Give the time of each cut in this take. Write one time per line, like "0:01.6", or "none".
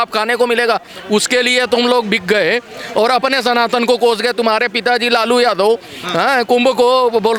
none